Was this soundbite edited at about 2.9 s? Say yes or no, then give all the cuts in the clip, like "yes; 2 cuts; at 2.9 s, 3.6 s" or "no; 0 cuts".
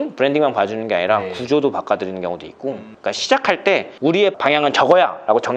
yes; 1 cut; at 2.9 s